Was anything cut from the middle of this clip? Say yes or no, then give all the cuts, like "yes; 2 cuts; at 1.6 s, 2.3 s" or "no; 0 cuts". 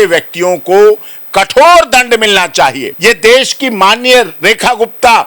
yes; 1 cut; at 2.9 s